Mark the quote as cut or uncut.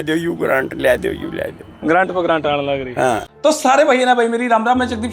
cut